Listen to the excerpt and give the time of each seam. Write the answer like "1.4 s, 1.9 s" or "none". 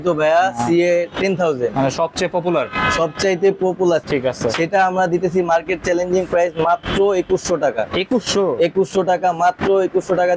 4.1 s